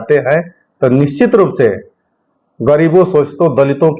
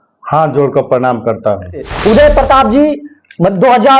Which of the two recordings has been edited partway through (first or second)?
second